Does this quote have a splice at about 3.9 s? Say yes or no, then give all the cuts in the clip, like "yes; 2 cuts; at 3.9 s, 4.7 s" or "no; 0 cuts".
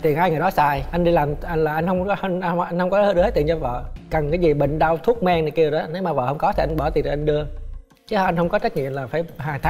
yes; 1 cut; at 3.9 s